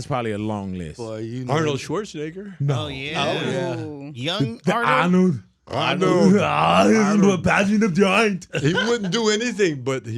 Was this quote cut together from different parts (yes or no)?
no